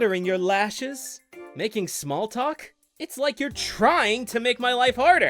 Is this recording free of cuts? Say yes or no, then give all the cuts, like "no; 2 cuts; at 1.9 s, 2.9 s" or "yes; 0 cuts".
no; 2 cuts; at 1.3 s, 2.9 s